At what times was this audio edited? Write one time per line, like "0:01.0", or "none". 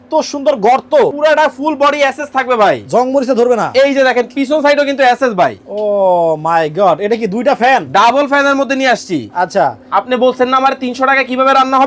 0:01.1